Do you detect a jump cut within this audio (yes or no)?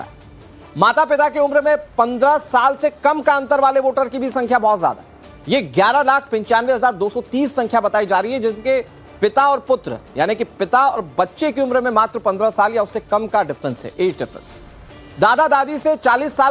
yes